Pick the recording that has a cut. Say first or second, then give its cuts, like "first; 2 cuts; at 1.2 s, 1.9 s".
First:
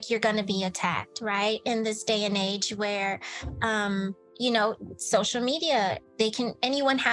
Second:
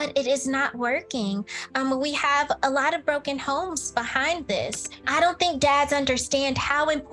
second; 1 cut; at 5.1 s